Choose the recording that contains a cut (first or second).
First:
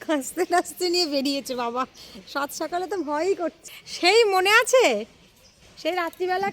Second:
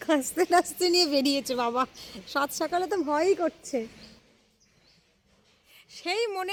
first